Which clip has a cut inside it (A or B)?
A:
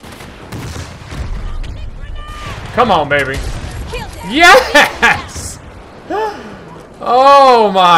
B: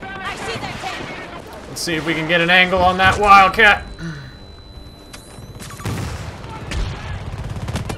B